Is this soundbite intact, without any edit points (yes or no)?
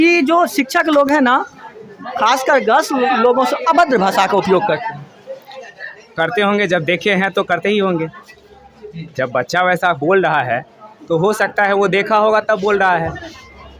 yes